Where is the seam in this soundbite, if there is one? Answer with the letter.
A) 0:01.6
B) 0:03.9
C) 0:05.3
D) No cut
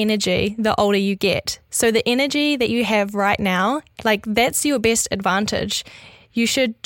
B